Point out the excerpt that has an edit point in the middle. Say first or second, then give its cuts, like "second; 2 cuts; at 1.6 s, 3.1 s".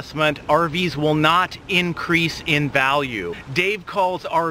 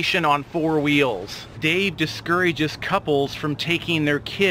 second; 1 cut; at 1.5 s